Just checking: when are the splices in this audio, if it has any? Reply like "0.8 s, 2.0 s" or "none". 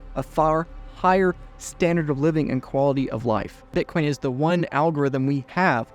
3.7 s